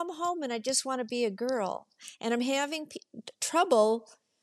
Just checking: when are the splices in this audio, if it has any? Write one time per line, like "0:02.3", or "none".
none